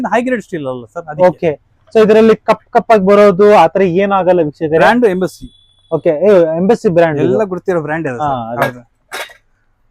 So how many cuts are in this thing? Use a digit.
0